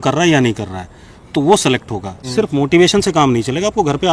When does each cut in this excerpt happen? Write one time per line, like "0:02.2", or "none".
0:02.2